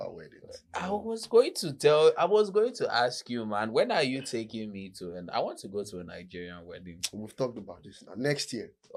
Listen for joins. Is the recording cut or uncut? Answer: uncut